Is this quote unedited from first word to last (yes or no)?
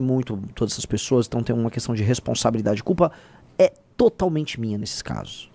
yes